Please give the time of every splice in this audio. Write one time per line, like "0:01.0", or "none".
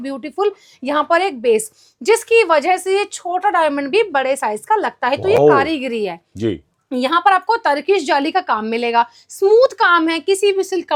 none